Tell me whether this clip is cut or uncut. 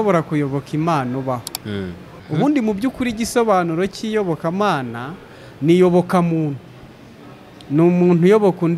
cut